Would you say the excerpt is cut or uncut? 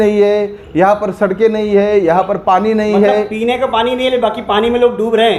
uncut